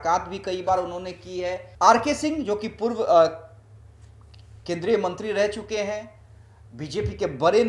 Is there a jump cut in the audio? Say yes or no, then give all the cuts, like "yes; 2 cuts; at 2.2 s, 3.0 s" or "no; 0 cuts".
no; 0 cuts